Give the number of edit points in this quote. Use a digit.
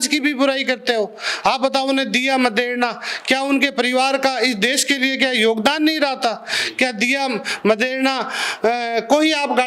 0